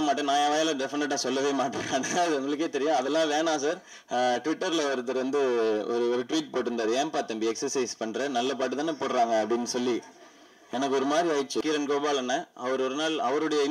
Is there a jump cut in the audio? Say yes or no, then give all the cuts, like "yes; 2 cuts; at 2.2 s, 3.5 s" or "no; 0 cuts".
yes; 2 cuts; at 3.9 s, 11.6 s